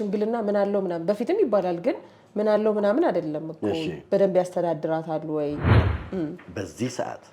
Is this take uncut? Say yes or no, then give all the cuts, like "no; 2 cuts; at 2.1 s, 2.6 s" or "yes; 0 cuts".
no; 1 cut; at 5.9 s